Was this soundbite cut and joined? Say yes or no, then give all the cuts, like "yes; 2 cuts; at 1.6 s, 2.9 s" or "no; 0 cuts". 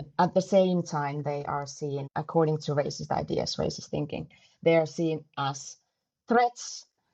no; 0 cuts